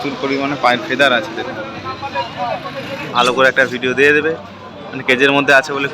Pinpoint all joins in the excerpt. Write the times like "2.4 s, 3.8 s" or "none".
3.1 s